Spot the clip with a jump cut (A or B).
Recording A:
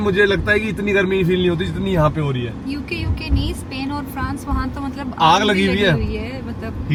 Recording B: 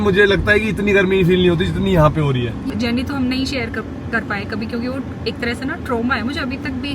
B